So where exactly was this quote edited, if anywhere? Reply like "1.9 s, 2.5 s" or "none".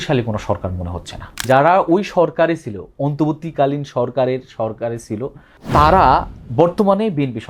1.4 s, 5.6 s